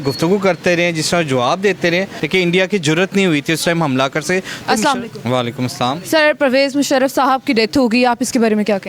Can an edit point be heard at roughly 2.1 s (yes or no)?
yes